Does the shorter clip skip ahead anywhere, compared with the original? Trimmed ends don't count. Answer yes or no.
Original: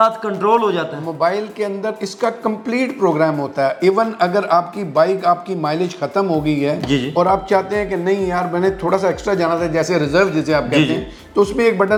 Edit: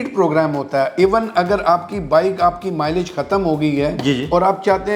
no